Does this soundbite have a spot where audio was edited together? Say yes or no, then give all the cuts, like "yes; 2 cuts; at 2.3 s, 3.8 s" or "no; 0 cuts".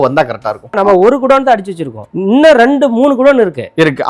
yes; 2 cuts; at 0.7 s, 2.0 s